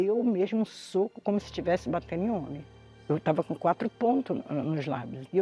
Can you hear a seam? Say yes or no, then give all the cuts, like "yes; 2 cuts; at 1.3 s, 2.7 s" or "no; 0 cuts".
yes; 1 cut; at 3.0 s